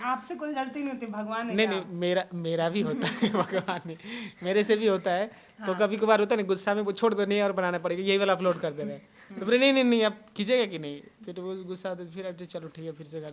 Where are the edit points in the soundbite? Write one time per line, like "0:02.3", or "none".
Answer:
none